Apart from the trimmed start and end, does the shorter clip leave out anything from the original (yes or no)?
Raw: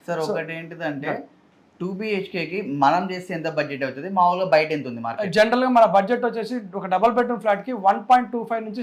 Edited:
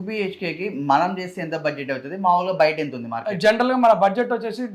no